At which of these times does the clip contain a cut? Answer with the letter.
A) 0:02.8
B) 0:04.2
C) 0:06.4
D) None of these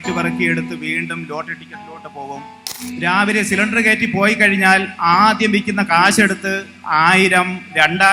A